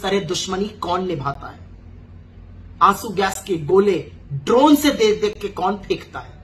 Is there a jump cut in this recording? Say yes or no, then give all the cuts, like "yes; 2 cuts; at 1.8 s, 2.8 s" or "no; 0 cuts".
no; 0 cuts